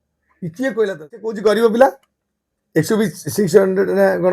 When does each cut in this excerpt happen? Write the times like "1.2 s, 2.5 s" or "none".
1.4 s